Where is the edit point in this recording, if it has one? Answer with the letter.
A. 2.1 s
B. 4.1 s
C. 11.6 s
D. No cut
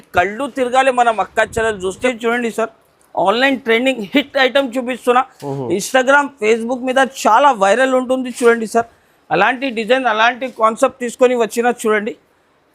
A